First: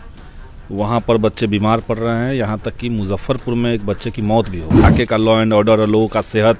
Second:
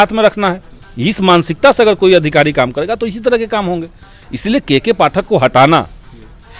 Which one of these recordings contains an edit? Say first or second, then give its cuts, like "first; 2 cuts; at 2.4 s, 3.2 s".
first; 1 cut; at 4.9 s